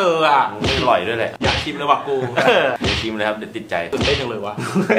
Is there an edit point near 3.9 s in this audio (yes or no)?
yes